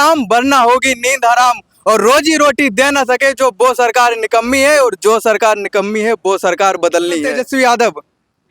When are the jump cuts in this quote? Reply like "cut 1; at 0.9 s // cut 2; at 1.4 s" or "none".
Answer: cut 1; at 7.3 s